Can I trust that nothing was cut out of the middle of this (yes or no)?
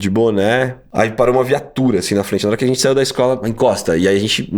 no